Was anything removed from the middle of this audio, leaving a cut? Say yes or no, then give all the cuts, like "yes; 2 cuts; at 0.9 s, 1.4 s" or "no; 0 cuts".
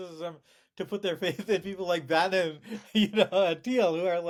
no; 0 cuts